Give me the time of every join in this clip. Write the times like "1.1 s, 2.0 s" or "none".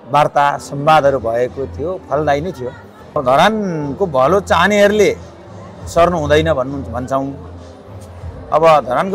3.2 s